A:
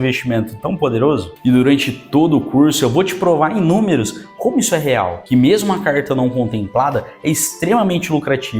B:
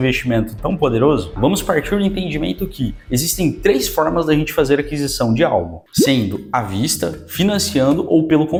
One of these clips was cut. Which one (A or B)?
A